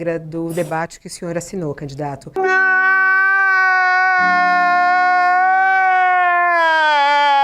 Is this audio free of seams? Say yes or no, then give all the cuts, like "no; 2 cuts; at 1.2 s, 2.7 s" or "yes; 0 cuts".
yes; 0 cuts